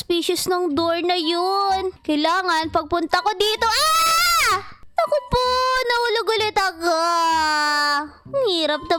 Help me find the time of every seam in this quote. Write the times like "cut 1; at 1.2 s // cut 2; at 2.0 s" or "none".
none